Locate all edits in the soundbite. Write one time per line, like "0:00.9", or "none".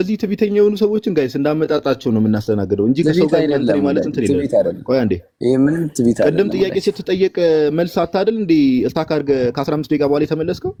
none